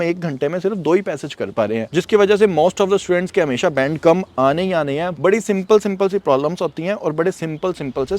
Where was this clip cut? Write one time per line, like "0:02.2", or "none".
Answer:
0:01.9
0:05.2